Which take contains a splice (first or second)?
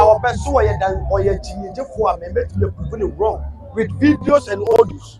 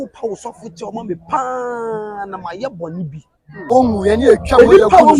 second